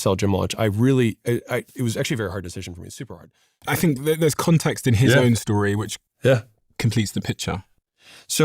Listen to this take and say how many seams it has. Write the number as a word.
one